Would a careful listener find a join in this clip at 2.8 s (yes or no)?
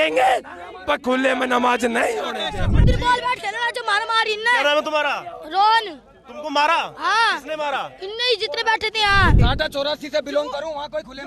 yes